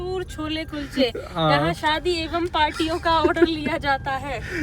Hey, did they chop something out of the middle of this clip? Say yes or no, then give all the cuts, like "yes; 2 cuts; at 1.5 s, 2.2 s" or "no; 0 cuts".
no; 0 cuts